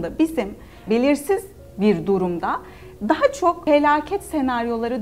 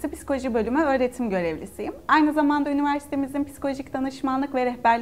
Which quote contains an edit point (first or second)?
first